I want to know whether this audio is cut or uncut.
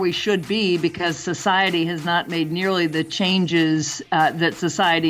uncut